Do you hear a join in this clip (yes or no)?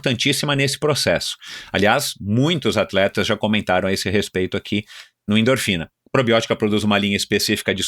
yes